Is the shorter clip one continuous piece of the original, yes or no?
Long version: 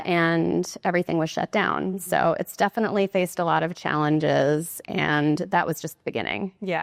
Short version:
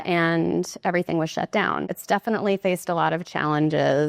no